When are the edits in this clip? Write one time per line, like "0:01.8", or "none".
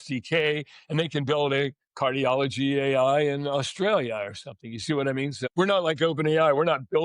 0:05.5